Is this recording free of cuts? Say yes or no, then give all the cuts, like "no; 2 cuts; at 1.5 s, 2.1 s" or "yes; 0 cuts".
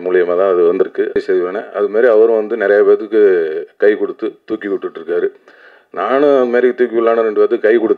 no; 1 cut; at 1.2 s